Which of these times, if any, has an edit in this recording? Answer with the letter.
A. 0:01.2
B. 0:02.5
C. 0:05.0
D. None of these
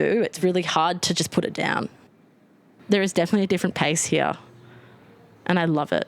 B